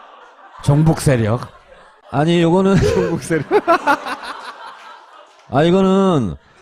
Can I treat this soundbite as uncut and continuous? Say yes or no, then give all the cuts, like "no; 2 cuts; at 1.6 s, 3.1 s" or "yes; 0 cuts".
yes; 0 cuts